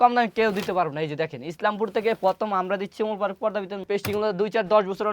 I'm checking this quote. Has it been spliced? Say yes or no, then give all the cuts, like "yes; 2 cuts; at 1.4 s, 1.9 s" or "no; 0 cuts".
yes; 1 cut; at 3.8 s